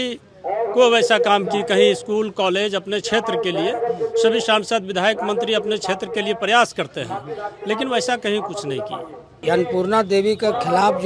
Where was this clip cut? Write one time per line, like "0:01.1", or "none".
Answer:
0:09.4